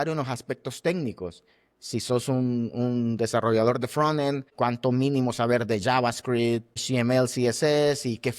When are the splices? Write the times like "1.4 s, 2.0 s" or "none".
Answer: 4.5 s, 6.8 s

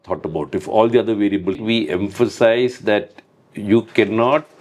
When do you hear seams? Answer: 1.6 s

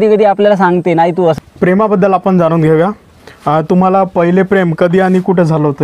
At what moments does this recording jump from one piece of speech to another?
1.4 s

